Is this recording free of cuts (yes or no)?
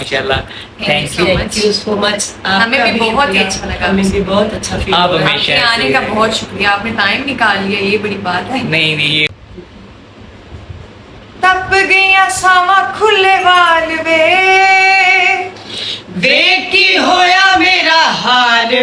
no